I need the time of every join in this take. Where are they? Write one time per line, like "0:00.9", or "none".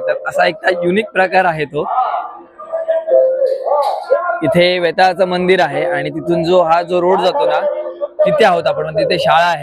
0:04.2

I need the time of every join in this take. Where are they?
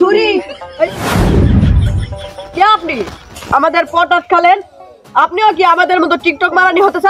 0:01.0
0:02.1

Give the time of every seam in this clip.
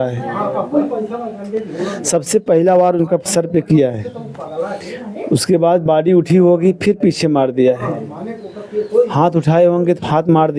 none

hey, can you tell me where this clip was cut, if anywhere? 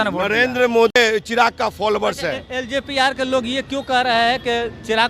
0:01.0

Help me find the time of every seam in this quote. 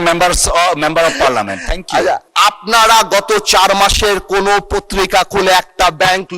0:02.3

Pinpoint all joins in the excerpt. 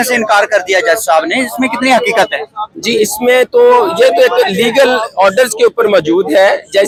none

